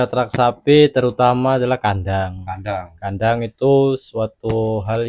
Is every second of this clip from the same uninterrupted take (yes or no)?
yes